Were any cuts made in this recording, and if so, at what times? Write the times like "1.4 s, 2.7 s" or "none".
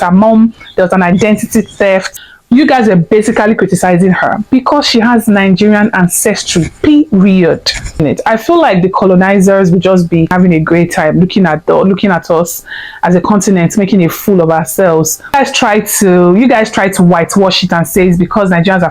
2.2 s, 7.9 s, 10.3 s, 15.3 s